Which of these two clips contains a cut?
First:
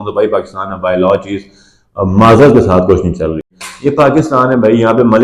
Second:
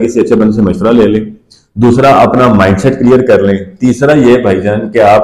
first; 1 cut; at 3.5 s

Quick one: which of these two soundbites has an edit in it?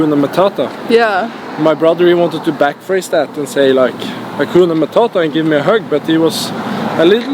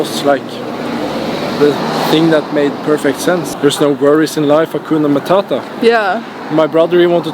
second; 1 cut; at 3.5 s

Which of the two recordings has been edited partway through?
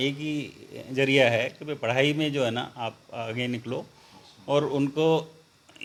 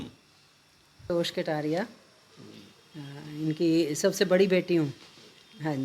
second; 1 cut; at 1.1 s

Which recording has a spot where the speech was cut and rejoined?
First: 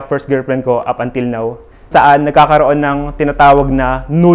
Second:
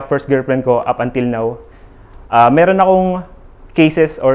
first; 1 cut; at 1.9 s

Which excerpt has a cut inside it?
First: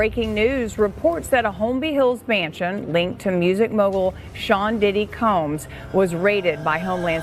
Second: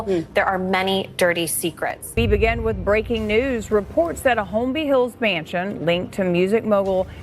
second; 1 cut; at 2.0 s

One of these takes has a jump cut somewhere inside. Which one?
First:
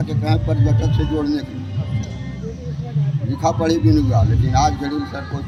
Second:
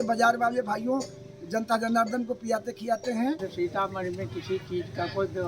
second; 1 cut; at 3.5 s

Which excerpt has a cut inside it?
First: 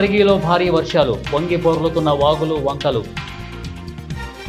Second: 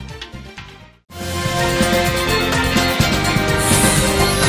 first; 1 cut; at 3.4 s

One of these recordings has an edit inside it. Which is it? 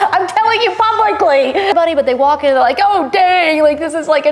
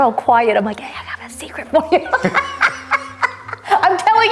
first; 1 cut; at 1.7 s

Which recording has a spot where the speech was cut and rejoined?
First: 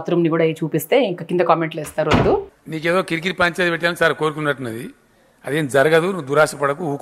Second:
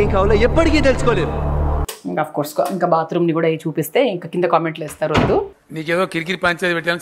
second; 1 cut; at 1.8 s

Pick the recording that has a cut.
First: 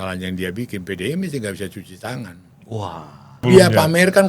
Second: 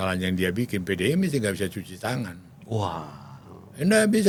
first; 1 cut; at 3.4 s

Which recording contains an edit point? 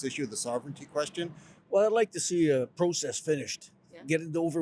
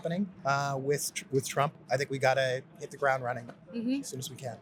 first; 1 cut; at 1.5 s

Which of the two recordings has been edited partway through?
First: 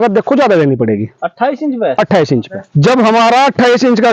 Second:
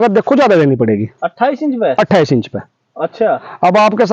first; 1 cut; at 2.6 s

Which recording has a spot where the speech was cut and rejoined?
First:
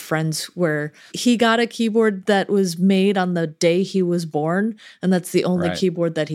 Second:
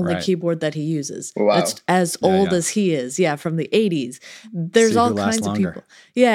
first; 1 cut; at 1.1 s

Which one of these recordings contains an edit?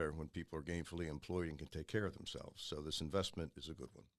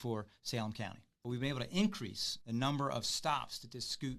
second; 2 cuts; at 1.1 s, 2.3 s

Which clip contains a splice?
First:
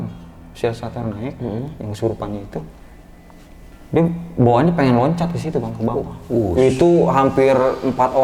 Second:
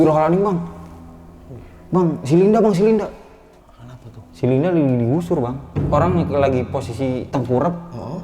second; 1 cut; at 5.7 s

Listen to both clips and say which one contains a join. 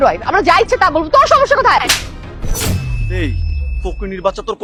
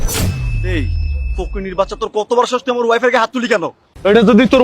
second; 1 cut; at 3.4 s

